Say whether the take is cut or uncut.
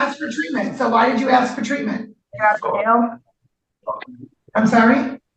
cut